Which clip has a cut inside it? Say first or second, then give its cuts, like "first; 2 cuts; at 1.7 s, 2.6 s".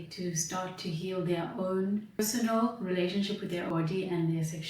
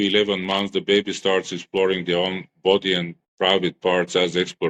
first; 2 cuts; at 2.2 s, 3.7 s